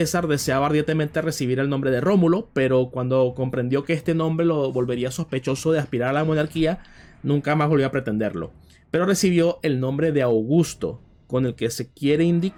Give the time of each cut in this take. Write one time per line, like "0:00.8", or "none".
none